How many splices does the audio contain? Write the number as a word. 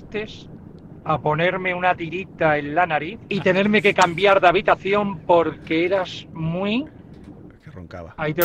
one